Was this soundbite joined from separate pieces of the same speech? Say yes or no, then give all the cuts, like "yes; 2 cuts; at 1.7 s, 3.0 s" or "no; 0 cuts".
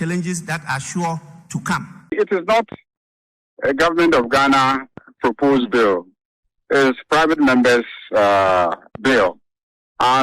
yes; 1 cut; at 2.0 s